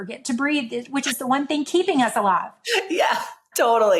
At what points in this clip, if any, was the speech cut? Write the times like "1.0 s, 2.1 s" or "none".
none